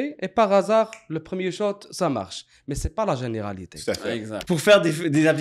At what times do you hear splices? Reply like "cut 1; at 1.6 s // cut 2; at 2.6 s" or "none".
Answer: cut 1; at 4.3 s